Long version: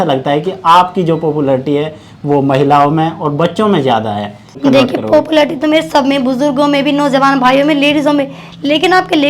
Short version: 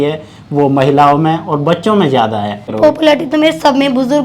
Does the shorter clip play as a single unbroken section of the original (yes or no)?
no